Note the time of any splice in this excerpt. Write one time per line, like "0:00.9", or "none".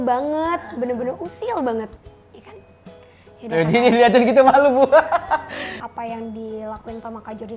0:02.0
0:05.6